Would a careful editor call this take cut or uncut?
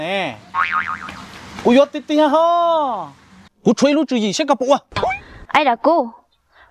cut